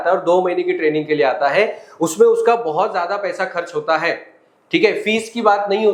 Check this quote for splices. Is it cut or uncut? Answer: uncut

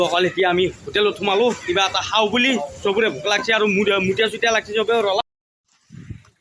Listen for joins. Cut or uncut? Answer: cut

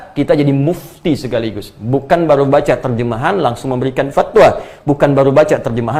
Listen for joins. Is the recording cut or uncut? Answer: uncut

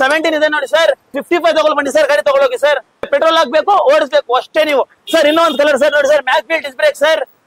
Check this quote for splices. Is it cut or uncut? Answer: cut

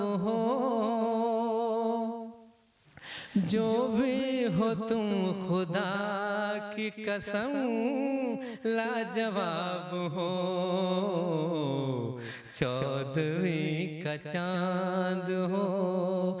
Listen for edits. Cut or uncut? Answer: uncut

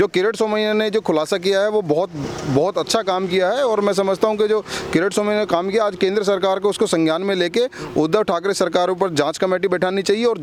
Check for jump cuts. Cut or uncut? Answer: uncut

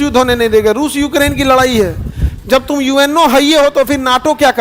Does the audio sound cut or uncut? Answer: uncut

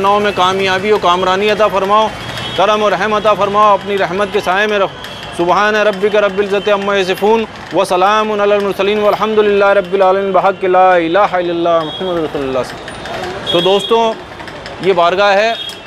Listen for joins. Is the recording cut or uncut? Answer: uncut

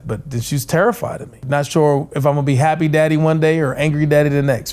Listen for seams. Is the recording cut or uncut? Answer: cut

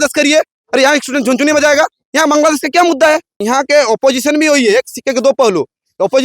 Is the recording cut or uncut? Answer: cut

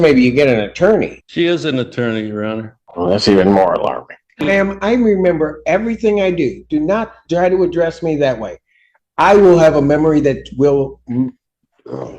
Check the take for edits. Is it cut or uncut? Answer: cut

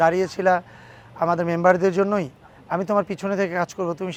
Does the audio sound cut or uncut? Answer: uncut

